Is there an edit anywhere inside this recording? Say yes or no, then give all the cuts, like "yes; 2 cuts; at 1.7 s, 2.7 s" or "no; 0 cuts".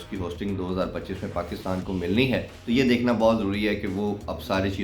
yes; 1 cut; at 2.5 s